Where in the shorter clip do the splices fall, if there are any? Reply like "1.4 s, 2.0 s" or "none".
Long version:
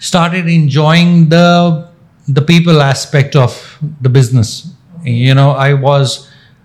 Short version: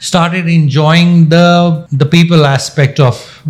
1.9 s